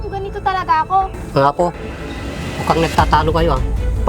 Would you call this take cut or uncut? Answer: cut